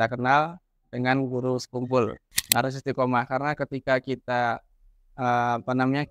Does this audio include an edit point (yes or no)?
yes